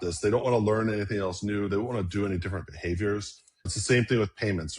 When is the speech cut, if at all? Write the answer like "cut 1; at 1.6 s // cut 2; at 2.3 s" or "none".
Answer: cut 1; at 3.7 s